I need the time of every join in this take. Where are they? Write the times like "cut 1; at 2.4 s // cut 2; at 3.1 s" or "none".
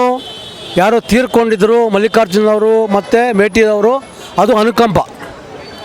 none